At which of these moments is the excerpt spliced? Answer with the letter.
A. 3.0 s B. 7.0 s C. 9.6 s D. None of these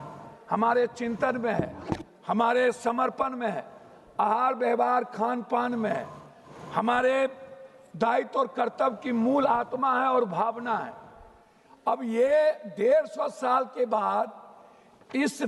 D